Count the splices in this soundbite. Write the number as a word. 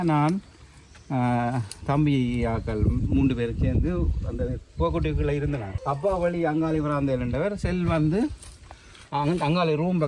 one